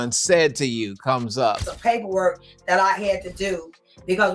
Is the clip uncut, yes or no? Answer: no